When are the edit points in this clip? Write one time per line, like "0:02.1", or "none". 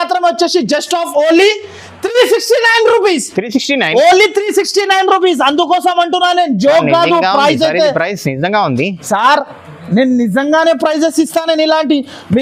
none